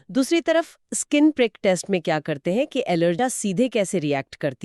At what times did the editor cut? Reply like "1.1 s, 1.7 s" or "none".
3.2 s